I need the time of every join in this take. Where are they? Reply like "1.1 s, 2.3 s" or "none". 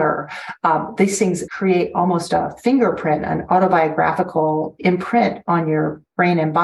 1.5 s